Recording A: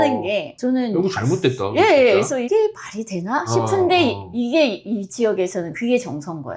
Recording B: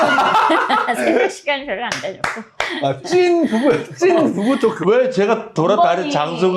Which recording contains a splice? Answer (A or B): A